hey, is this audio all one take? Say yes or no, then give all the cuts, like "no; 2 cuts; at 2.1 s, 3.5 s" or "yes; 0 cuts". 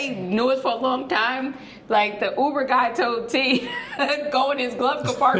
yes; 0 cuts